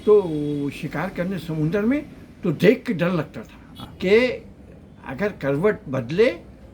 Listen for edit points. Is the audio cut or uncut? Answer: cut